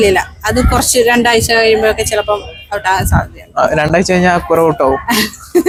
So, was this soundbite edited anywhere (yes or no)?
no